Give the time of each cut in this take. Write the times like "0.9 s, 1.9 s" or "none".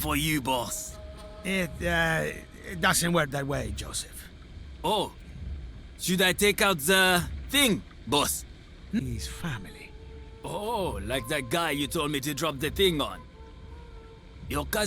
9.0 s